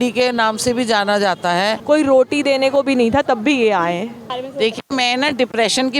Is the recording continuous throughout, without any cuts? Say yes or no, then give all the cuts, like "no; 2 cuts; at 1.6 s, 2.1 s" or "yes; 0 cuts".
no; 2 cuts; at 1.8 s, 4.2 s